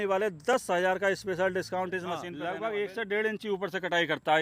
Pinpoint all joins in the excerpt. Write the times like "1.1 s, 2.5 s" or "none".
2.3 s